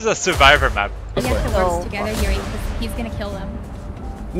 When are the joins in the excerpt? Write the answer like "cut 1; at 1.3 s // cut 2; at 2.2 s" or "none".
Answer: cut 1; at 1.0 s